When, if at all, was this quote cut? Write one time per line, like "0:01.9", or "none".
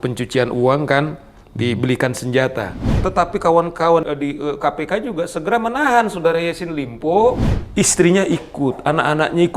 0:02.8
0:04.1
0:07.5